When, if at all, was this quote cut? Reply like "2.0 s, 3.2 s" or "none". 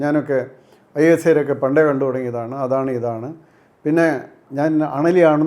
4.4 s